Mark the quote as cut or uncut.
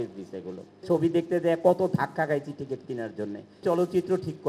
cut